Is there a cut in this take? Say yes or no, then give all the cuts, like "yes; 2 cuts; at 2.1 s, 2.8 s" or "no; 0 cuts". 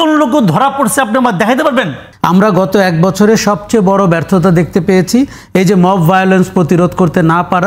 yes; 1 cut; at 2.0 s